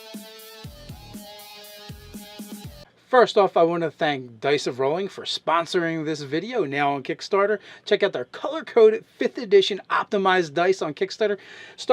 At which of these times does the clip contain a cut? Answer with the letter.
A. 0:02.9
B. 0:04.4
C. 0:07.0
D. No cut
C